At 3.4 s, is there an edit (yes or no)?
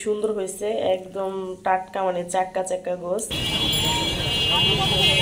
yes